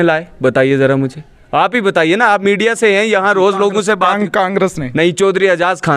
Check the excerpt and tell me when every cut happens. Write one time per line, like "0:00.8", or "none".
none